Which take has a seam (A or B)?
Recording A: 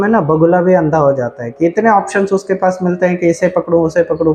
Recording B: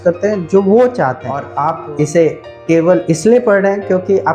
B